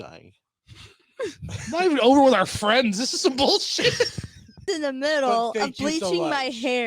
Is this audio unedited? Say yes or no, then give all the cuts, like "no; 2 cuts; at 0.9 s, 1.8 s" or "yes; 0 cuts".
no; 1 cut; at 4.7 s